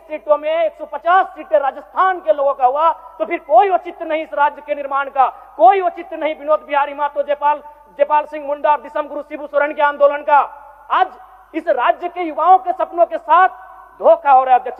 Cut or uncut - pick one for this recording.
uncut